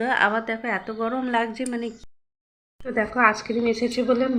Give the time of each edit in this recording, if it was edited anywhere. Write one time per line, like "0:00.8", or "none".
0:02.0